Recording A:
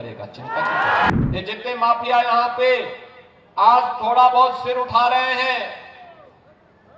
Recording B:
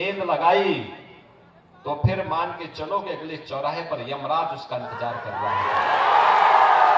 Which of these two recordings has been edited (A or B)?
A